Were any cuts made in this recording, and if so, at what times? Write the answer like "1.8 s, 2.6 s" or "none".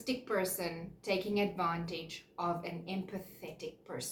none